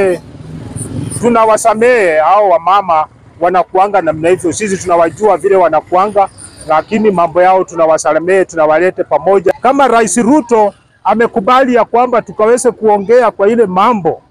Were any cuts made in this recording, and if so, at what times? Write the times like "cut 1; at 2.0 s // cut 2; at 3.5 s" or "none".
cut 1; at 9.5 s